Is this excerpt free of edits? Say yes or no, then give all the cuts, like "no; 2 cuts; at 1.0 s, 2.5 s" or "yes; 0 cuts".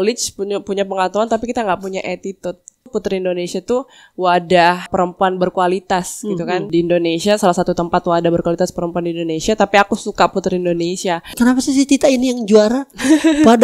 no; 4 cuts; at 2.9 s, 4.9 s, 6.6 s, 11.3 s